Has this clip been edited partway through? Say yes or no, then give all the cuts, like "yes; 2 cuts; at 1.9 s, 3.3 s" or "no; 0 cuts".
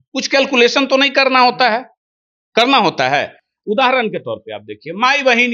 no; 0 cuts